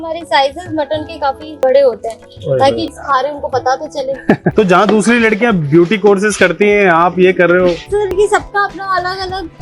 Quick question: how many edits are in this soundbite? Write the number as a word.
three